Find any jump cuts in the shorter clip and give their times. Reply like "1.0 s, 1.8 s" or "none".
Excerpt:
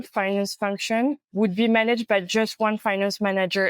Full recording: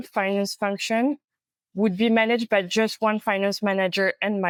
1.2 s